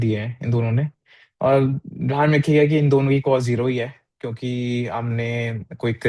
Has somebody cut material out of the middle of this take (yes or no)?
no